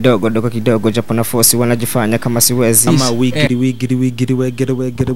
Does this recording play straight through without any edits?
no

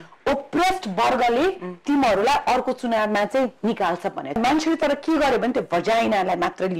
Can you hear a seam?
yes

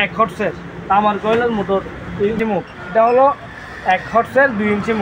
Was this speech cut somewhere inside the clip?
yes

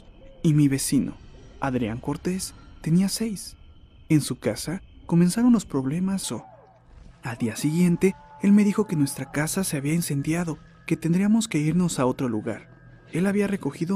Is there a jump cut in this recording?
no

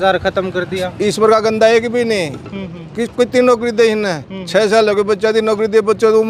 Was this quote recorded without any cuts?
yes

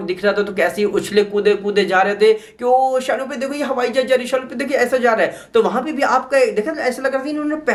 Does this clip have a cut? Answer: no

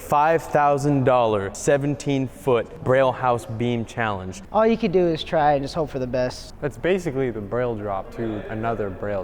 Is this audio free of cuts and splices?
no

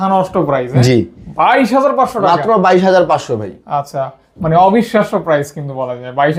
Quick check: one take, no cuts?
yes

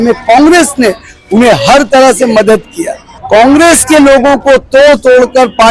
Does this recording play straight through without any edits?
no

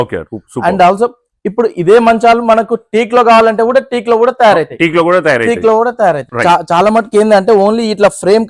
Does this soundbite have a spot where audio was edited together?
yes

